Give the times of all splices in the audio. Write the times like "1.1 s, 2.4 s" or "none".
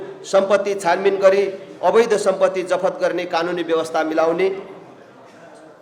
none